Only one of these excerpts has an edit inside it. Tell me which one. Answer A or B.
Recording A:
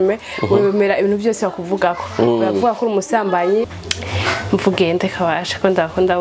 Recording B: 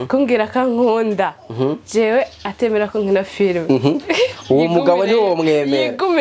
A